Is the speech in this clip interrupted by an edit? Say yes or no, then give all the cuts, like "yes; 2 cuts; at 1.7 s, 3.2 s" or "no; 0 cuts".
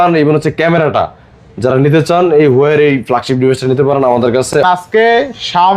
yes; 1 cut; at 4.6 s